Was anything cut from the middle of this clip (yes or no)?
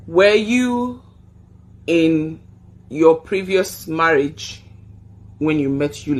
no